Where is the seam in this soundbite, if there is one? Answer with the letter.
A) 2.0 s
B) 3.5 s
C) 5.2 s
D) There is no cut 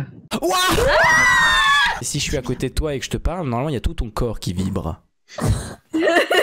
A